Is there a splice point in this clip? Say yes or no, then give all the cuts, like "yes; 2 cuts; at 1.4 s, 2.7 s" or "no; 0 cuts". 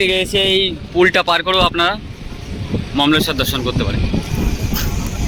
no; 0 cuts